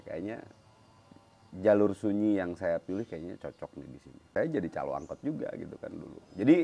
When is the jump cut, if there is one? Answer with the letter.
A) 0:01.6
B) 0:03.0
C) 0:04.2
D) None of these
C